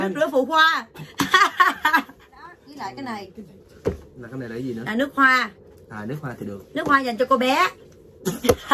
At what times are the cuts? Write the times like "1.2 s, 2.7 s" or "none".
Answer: 2.6 s